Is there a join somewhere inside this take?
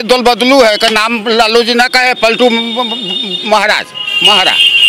no; 0 cuts

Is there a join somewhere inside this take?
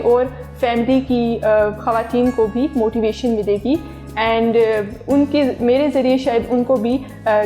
no; 0 cuts

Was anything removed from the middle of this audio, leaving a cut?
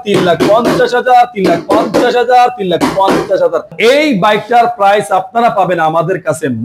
yes; 1 cut; at 3.7 s

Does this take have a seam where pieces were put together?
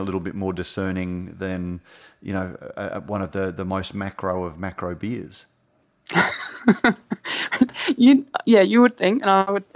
no; 0 cuts

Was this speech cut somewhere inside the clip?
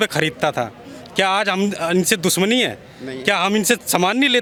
no; 0 cuts

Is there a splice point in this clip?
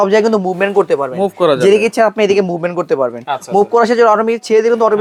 no; 0 cuts

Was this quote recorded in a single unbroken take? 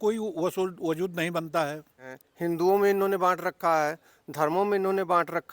no; 1 cut; at 2.2 s

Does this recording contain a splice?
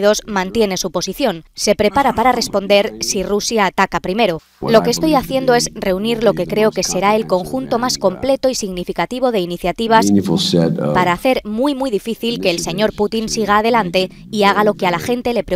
no; 0 cuts

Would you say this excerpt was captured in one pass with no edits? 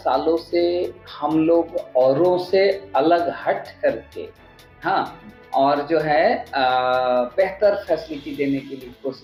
yes; 0 cuts

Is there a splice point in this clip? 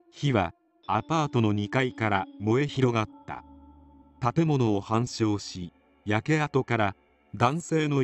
no; 0 cuts

